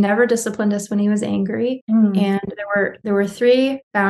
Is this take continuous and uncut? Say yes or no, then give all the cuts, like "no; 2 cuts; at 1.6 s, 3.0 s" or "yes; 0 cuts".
no; 1 cut; at 1.8 s